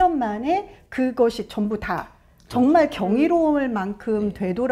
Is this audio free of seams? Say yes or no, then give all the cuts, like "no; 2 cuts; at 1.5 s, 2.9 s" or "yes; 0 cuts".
yes; 0 cuts